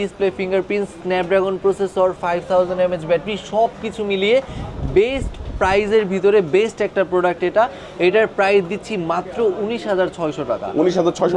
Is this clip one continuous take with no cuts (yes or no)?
yes